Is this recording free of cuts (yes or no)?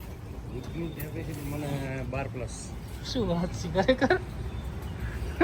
yes